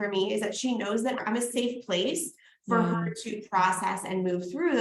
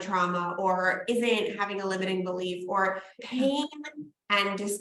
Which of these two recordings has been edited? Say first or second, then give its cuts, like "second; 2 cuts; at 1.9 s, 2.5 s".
second; 1 cut; at 3.2 s